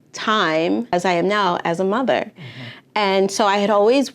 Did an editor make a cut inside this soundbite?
yes; 1 cut; at 0.9 s

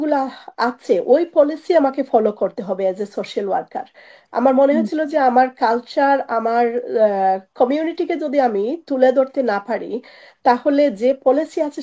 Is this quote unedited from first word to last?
yes; 0 cuts

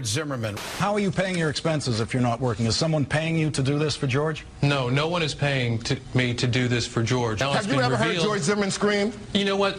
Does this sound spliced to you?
yes; 1 cut; at 3.0 s

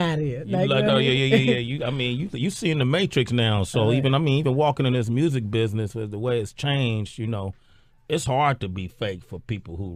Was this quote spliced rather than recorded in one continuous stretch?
yes; 1 cut; at 3.2 s

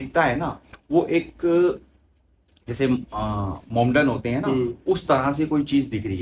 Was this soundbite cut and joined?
no; 0 cuts

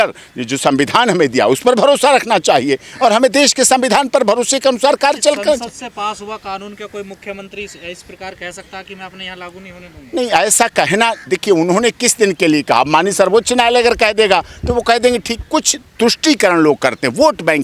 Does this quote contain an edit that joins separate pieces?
no; 0 cuts

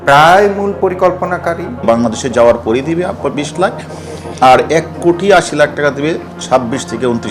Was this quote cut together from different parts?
yes; 1 cut; at 1.8 s

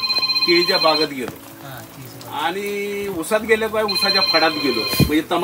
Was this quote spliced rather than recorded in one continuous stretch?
no; 0 cuts

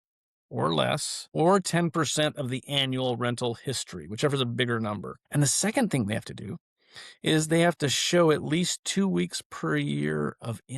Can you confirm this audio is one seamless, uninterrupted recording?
no; 1 cut; at 5.1 s

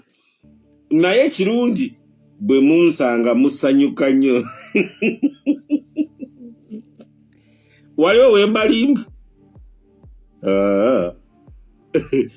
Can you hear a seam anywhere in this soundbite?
no; 0 cuts

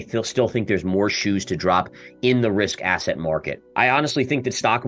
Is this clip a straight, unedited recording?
no; 1 cut; at 3.6 s

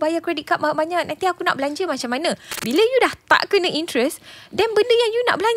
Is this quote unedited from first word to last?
no; 1 cut; at 2.5 s

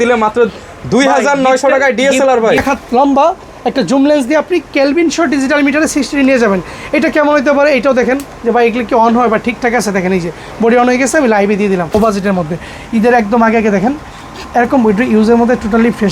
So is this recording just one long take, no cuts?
no; 2 cuts; at 2.6 s, 11.9 s

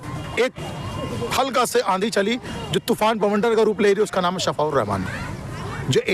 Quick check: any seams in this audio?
no; 0 cuts

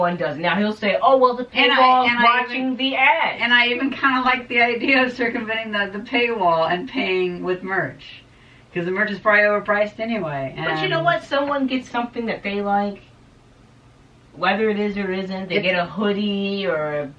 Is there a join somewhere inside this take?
no; 0 cuts

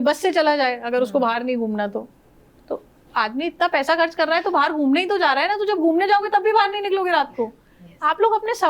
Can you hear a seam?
no; 0 cuts

